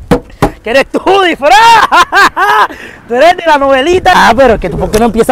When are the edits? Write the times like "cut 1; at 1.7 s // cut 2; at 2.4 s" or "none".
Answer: cut 1; at 4.1 s